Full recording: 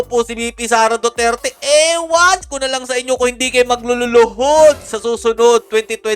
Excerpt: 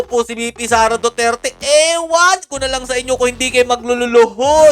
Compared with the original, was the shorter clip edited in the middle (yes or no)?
no